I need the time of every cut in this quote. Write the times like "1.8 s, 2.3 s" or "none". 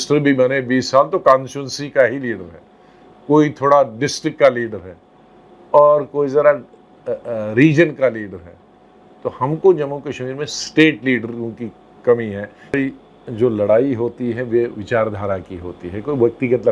12.7 s